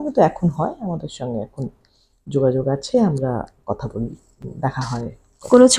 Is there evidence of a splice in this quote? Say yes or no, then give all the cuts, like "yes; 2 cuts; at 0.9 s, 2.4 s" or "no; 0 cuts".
no; 0 cuts